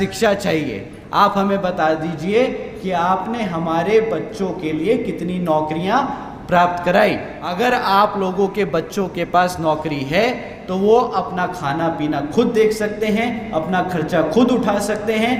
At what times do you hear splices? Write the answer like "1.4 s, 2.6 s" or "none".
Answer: 7.6 s